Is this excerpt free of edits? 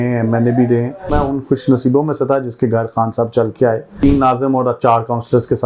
no; 2 cuts; at 1.1 s, 4.0 s

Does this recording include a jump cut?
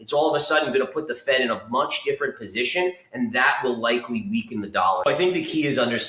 yes; 1 cut; at 5.0 s

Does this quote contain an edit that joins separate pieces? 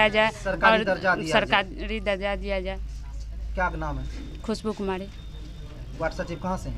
no; 0 cuts

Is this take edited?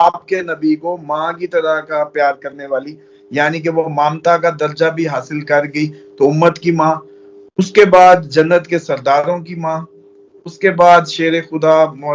no; 0 cuts

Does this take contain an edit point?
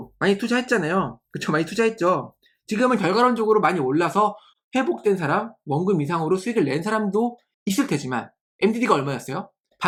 no; 0 cuts

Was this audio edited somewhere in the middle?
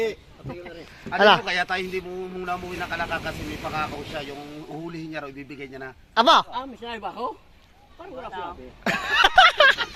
no; 0 cuts

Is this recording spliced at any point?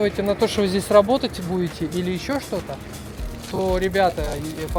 no; 0 cuts

